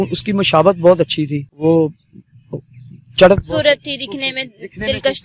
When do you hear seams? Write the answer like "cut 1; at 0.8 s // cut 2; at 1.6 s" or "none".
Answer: cut 1; at 1.5 s